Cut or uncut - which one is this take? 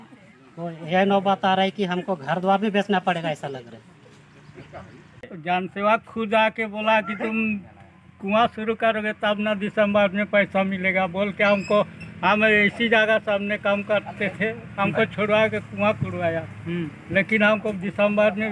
cut